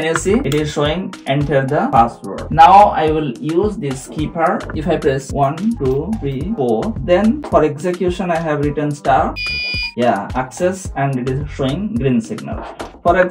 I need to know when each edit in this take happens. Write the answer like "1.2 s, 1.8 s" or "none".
4.7 s